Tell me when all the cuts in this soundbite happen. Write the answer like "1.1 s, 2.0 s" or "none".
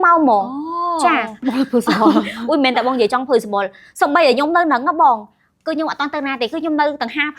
1.4 s